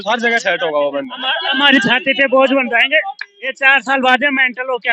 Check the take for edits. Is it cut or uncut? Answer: cut